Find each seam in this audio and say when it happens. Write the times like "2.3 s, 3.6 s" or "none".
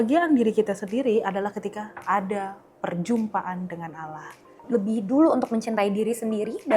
4.6 s